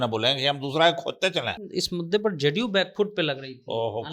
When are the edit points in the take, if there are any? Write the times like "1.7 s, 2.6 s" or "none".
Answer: 1.6 s